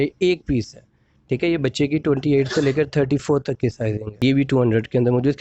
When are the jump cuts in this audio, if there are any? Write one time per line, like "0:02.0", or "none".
0:04.1